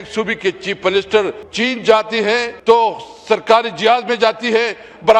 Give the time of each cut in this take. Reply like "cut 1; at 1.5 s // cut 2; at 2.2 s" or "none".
cut 1; at 1.4 s // cut 2; at 2.5 s